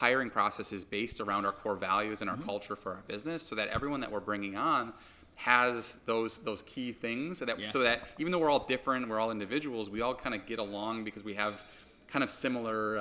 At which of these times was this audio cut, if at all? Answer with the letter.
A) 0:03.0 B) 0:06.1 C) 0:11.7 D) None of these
D